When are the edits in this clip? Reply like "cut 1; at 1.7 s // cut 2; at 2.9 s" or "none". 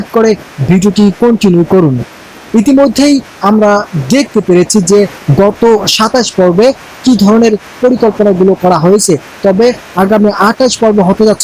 cut 1; at 5.2 s